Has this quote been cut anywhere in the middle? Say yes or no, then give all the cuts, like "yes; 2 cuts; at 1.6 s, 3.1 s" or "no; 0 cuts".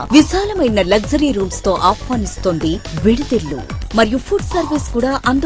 no; 0 cuts